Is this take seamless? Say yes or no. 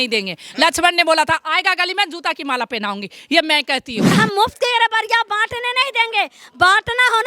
no